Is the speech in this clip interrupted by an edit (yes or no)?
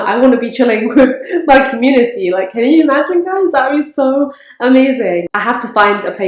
no